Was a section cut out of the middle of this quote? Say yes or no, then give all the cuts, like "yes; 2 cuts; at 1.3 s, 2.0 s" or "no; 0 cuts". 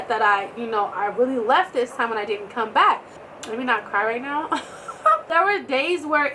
yes; 2 cuts; at 3.2 s, 5.3 s